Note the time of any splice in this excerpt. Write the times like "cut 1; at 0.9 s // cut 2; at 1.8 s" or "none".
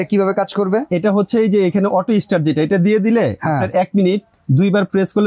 cut 1; at 4.3 s